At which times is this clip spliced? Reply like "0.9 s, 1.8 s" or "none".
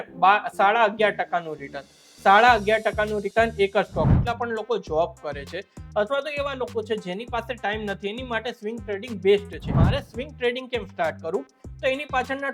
4.1 s, 9.7 s